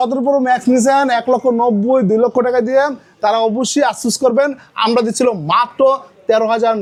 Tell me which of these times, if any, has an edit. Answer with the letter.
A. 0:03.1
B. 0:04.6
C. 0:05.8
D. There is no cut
D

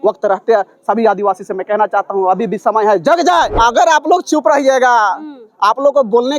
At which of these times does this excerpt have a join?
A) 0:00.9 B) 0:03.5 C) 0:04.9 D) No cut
B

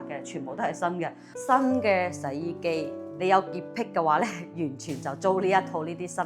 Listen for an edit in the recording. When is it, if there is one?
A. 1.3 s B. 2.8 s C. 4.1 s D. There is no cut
A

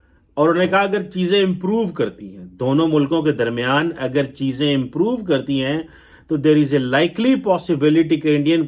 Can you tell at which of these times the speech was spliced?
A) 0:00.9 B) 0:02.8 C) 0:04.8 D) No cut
D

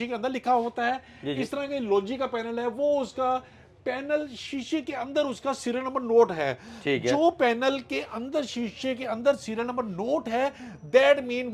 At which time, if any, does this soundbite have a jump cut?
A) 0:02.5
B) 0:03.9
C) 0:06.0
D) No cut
D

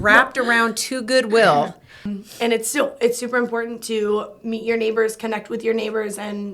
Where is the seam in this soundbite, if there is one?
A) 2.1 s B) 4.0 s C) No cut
A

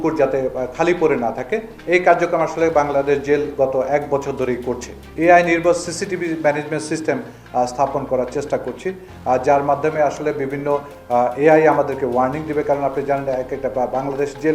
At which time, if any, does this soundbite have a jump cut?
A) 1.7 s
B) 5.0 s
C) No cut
B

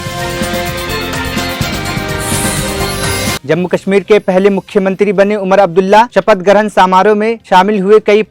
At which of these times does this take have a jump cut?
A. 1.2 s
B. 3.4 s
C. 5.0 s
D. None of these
B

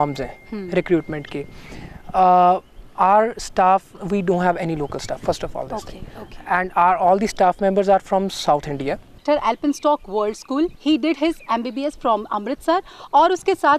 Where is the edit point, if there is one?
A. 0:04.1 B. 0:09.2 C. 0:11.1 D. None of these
B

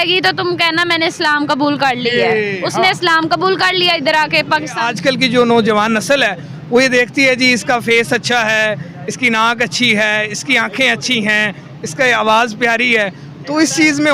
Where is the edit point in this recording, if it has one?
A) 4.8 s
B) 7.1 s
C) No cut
A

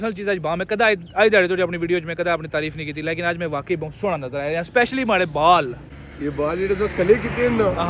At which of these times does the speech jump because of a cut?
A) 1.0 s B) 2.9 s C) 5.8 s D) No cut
C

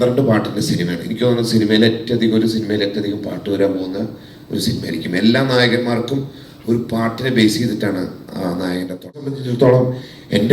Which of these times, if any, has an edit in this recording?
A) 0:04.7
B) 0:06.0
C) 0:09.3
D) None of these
C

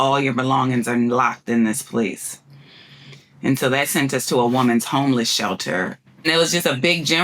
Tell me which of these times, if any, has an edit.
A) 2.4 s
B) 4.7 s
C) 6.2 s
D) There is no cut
C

